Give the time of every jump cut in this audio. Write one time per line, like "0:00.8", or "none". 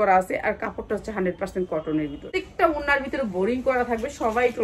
0:02.2

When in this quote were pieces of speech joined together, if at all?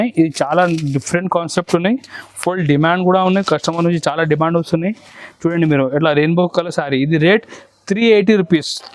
none

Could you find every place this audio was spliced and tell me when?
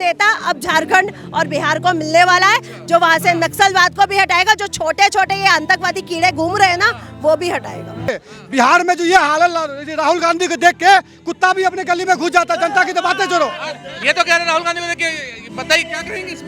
0:08.0

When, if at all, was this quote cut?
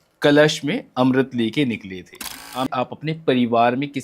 0:02.7

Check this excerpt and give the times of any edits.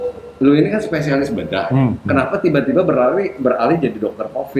none

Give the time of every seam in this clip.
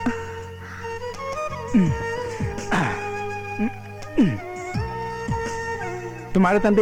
none

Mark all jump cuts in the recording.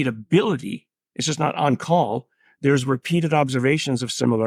none

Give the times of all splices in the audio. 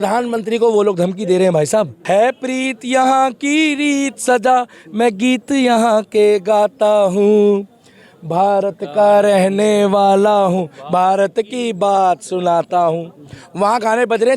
0:02.0

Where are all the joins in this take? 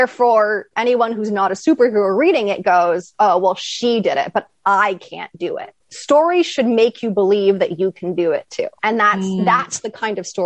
0:08.7

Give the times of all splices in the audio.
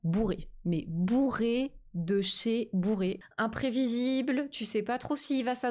0:03.2

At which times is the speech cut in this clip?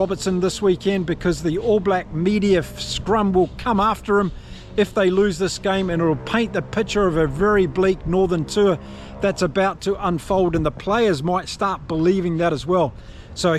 none

